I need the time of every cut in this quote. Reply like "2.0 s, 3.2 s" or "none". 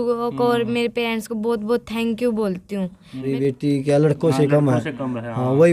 3.3 s